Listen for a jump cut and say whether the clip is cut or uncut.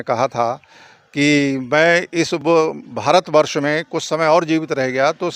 uncut